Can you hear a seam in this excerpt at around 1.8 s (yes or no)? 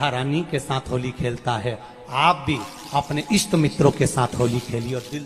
no